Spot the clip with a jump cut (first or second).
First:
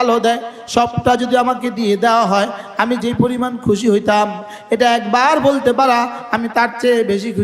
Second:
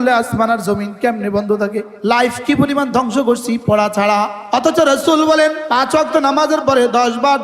second